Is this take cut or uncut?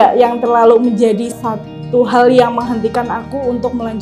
cut